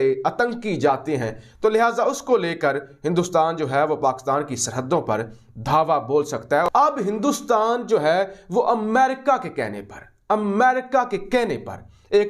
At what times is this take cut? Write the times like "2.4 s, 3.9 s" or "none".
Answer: none